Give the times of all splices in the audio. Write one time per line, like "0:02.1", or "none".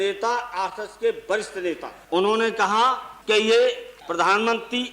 0:01.9
0:03.1
0:03.9